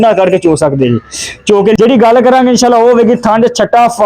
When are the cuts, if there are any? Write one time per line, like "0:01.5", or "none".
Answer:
0:01.8